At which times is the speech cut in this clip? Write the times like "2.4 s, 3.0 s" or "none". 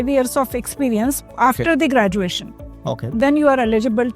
none